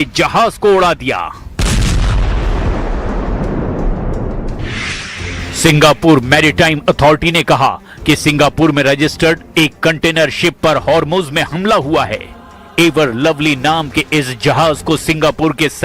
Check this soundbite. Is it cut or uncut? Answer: cut